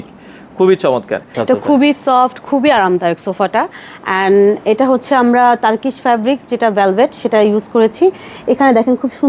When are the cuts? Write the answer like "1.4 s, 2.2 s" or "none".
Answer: 1.3 s